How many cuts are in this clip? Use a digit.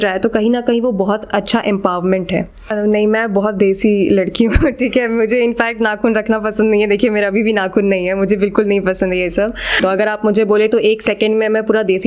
2